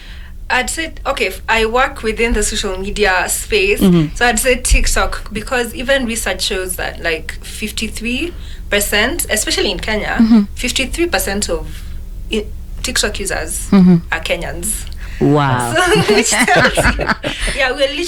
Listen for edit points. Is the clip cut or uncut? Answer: uncut